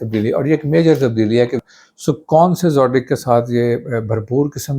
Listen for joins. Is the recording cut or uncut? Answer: cut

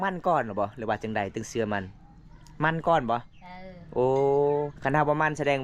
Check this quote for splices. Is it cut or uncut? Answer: uncut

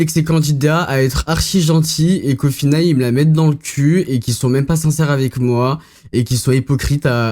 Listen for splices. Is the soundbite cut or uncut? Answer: uncut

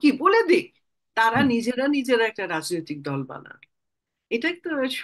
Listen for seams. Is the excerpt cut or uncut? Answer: cut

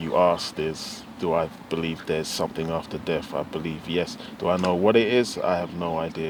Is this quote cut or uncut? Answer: uncut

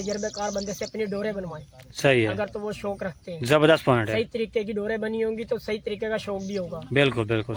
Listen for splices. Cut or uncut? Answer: uncut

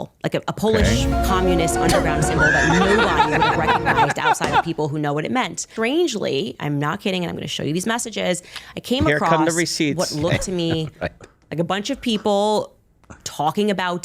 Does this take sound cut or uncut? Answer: cut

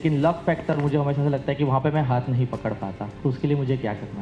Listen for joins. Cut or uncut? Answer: cut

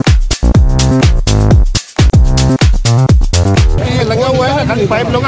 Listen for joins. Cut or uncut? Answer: cut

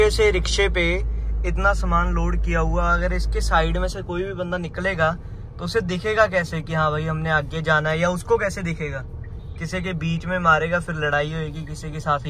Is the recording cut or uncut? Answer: uncut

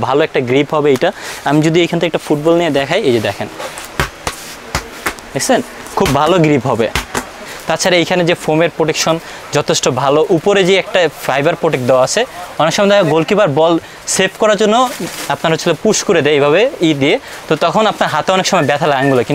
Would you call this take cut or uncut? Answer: cut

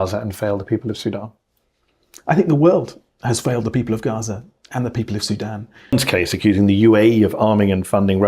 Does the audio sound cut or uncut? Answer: cut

